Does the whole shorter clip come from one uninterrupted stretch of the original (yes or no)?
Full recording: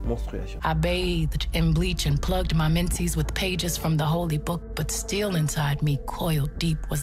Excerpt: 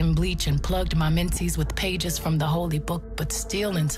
yes